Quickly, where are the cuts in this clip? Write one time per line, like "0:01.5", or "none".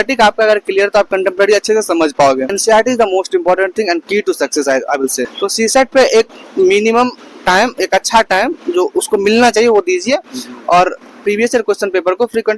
0:02.5
0:05.3